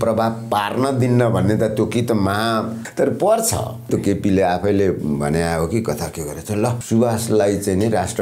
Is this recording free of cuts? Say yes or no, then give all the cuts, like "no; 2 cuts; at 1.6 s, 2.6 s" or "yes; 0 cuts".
no; 3 cuts; at 2.8 s, 3.9 s, 6.8 s